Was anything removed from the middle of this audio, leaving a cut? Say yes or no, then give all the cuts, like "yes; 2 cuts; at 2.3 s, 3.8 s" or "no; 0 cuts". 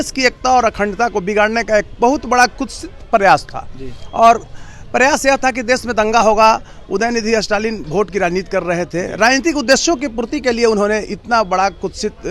no; 0 cuts